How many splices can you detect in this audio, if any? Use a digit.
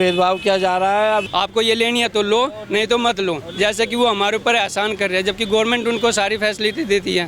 1